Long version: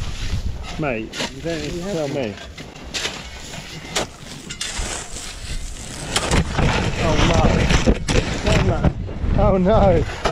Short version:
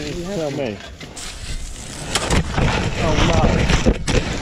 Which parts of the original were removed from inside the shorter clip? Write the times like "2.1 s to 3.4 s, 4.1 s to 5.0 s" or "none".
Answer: 2.7 s to 5.2 s